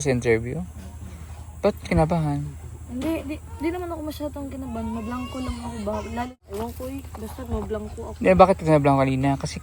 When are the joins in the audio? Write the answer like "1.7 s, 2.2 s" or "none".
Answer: 6.3 s